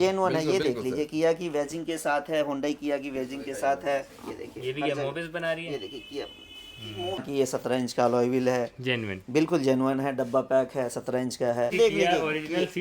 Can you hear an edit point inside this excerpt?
yes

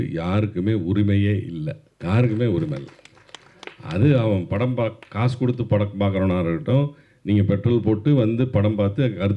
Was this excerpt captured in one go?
no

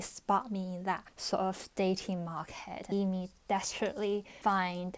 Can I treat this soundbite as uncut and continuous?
no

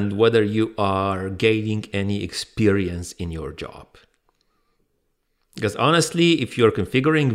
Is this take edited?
no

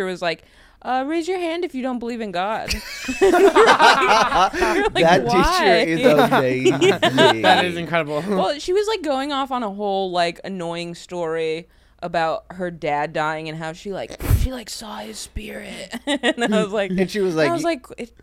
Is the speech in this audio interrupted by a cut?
no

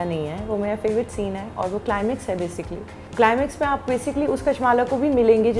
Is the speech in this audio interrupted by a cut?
yes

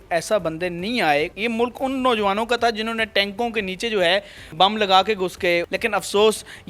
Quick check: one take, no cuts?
no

